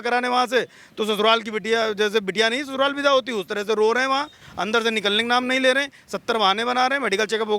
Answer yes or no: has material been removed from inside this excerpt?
no